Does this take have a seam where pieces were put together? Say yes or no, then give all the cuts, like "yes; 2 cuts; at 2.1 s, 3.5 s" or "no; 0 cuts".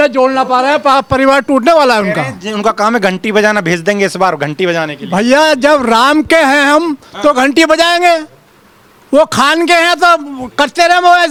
no; 0 cuts